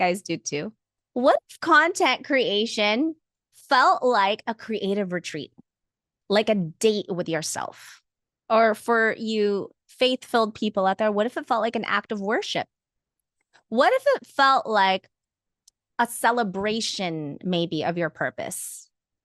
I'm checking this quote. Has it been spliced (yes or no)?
no